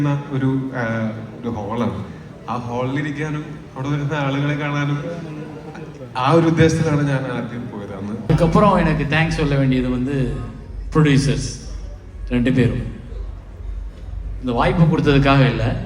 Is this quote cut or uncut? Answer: cut